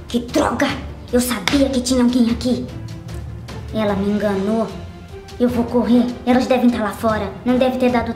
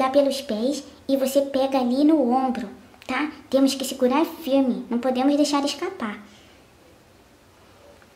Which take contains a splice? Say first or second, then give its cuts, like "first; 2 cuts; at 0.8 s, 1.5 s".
second; 1 cut; at 0.9 s